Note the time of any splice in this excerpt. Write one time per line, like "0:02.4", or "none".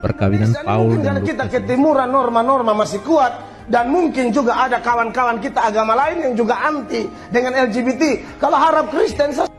0:01.2